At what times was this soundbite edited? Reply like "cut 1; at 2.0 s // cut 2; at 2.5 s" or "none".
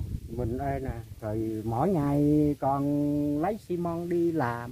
none

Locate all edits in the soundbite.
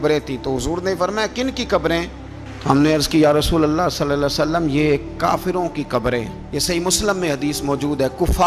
none

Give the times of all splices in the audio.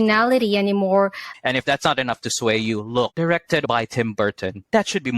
cut 1; at 1.3 s // cut 2; at 3.6 s

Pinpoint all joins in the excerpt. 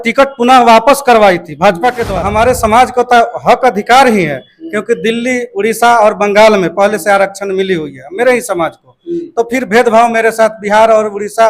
cut 1; at 2.1 s

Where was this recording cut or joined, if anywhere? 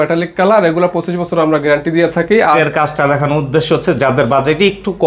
cut 1; at 2.6 s

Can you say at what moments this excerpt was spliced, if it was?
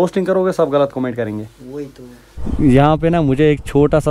cut 1; at 2.4 s

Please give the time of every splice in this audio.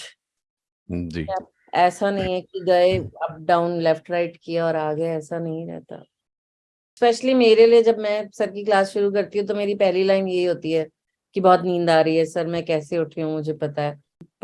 cut 1; at 6.8 s

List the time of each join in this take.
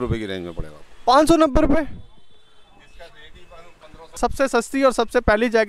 cut 1; at 4.2 s

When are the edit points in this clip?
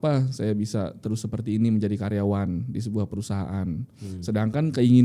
none

